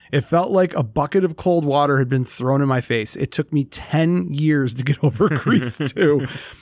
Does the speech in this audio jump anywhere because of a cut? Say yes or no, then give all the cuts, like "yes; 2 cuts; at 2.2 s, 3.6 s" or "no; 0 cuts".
no; 0 cuts